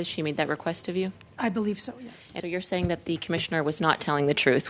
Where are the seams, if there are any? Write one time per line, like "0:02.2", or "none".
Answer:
0:02.4